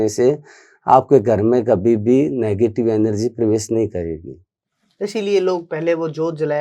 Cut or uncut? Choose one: uncut